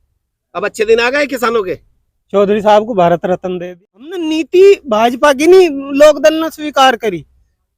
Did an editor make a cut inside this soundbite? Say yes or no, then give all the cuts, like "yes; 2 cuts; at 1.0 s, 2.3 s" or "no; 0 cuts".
yes; 1 cut; at 4.3 s